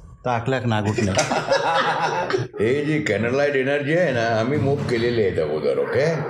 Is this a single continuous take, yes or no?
no